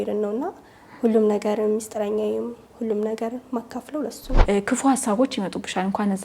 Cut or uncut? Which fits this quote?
cut